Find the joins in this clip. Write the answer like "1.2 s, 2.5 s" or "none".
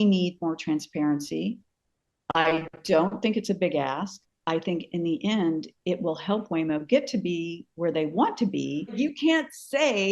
9.0 s